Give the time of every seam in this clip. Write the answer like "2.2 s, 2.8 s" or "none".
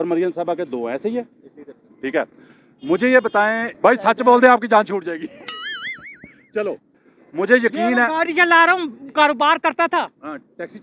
3.8 s, 7.0 s